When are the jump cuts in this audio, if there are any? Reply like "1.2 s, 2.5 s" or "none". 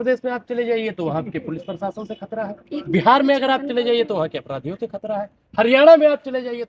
none